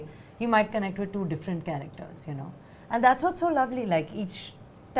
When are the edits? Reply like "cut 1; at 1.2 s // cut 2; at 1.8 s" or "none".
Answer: none